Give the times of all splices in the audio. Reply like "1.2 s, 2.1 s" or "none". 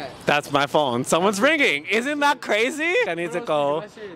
3.1 s